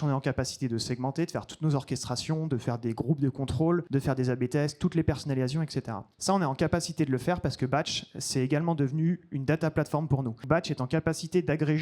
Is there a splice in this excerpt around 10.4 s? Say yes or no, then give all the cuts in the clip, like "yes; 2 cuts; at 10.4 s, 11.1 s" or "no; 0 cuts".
yes; 2 cuts; at 3.9 s, 10.4 s